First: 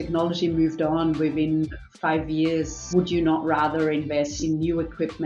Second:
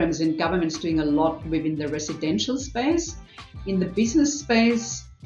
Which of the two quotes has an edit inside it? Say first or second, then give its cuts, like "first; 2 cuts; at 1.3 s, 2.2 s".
first; 2 cuts; at 2.8 s, 4.3 s